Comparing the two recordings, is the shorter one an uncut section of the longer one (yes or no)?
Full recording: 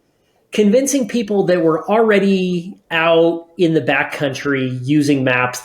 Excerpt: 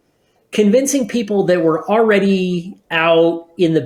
yes